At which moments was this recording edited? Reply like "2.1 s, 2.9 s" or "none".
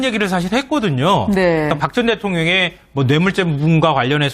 1.0 s

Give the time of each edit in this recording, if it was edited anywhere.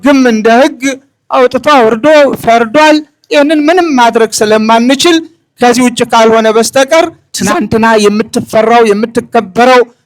7.3 s

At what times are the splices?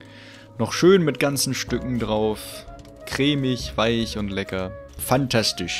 4.9 s

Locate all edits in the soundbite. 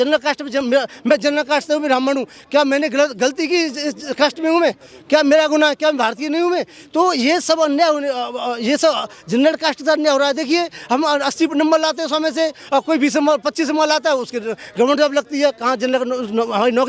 none

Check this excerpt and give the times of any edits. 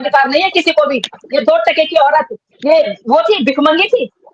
1.2 s

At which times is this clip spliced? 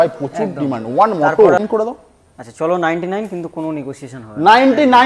1.6 s

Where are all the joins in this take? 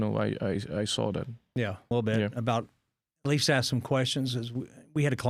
1.9 s

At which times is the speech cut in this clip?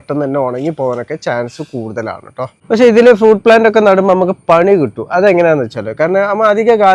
2.6 s

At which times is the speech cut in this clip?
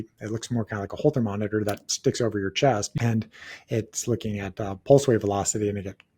2.9 s

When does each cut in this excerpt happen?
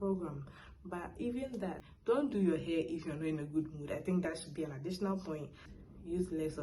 1.9 s, 5.6 s

